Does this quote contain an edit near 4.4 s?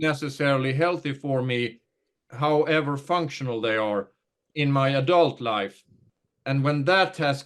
yes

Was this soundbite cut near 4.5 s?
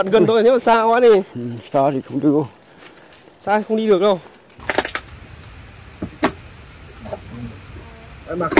yes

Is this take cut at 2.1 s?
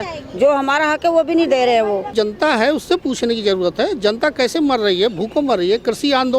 yes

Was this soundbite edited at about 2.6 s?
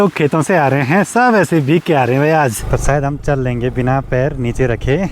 yes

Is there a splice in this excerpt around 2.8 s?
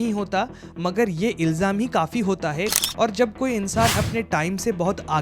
yes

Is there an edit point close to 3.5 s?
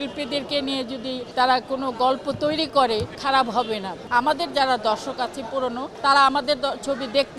yes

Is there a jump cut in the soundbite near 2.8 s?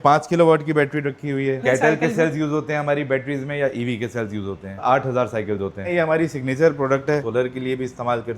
no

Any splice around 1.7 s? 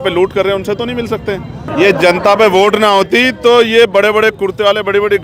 yes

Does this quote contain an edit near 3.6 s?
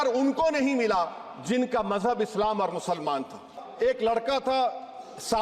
yes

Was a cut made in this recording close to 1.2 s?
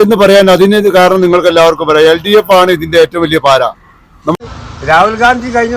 no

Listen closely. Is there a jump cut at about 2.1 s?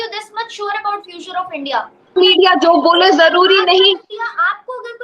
yes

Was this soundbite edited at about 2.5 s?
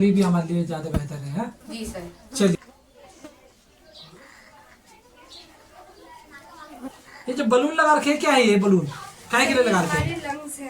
yes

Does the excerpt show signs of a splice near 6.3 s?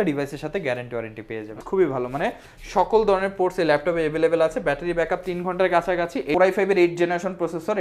yes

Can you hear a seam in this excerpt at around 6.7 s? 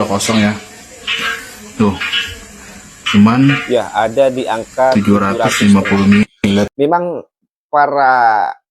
yes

